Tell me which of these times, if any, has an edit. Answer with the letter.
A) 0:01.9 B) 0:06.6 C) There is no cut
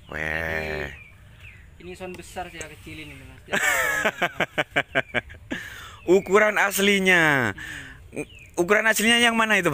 C